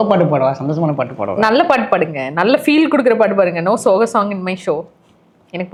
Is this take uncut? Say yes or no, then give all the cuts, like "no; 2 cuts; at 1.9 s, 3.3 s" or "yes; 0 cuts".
yes; 0 cuts